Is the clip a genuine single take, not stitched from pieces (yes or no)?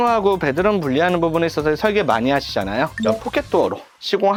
yes